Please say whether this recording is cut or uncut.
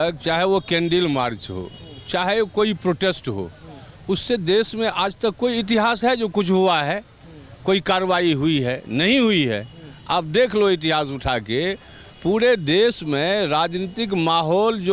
uncut